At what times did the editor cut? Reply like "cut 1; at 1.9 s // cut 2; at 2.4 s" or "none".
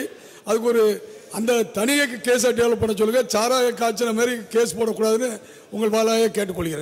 none